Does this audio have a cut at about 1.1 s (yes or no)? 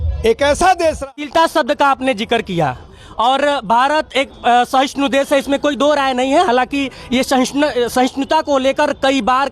yes